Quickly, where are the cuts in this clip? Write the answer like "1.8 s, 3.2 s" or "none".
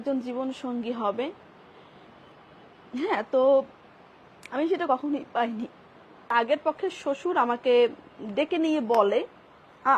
6.3 s